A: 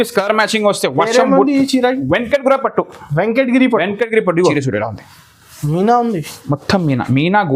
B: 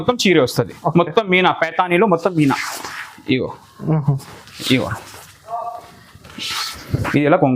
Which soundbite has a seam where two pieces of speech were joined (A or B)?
A